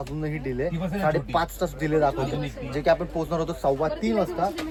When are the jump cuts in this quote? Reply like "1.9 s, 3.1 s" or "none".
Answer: none